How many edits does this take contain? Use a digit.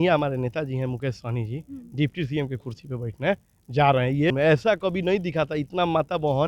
1